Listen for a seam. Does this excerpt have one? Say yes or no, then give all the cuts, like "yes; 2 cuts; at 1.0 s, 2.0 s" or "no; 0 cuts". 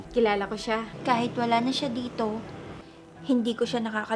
yes; 1 cut; at 0.9 s